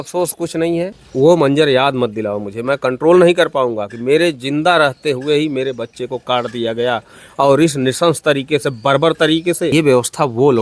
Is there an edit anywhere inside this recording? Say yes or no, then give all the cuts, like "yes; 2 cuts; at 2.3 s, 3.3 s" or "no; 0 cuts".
yes; 2 cuts; at 1.0 s, 9.7 s